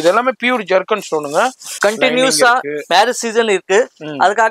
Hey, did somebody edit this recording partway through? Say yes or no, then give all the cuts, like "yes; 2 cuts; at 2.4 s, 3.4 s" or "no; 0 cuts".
yes; 1 cut; at 1.8 s